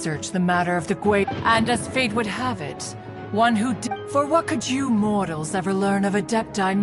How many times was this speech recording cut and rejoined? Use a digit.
2